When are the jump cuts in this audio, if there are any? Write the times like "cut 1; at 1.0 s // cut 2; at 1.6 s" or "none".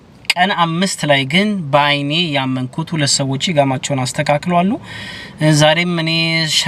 none